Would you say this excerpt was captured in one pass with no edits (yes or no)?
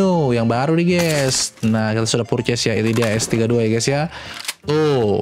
yes